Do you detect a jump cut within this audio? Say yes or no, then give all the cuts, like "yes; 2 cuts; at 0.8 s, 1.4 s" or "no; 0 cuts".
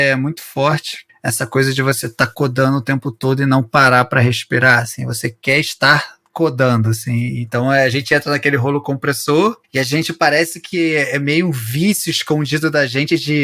yes; 1 cut; at 1.0 s